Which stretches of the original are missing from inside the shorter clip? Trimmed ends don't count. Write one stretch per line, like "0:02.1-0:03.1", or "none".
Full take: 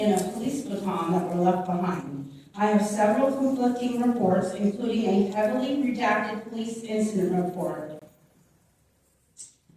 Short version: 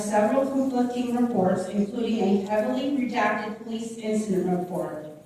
none